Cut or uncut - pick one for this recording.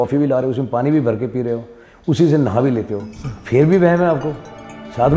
uncut